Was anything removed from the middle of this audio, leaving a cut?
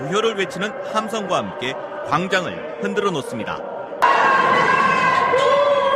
no; 0 cuts

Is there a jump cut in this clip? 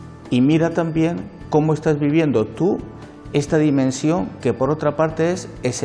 no; 0 cuts

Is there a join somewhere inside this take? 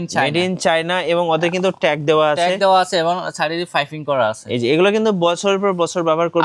no; 0 cuts

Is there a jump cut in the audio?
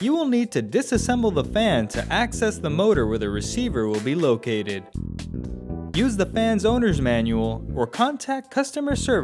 no; 0 cuts

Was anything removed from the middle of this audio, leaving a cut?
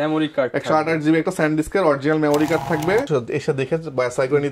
yes; 1 cut; at 3.1 s

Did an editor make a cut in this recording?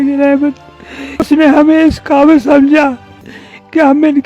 yes; 1 cut; at 1.3 s

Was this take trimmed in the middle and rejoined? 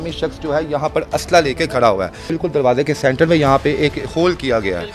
yes; 1 cut; at 2.3 s

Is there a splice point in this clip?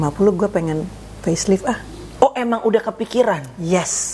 no; 0 cuts

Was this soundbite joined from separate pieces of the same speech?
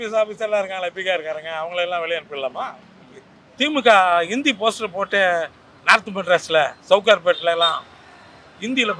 no; 0 cuts

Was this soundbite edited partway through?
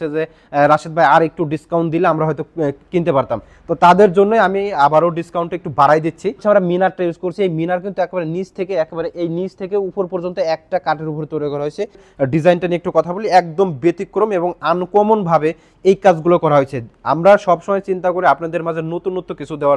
yes; 2 cuts; at 6.4 s, 12.1 s

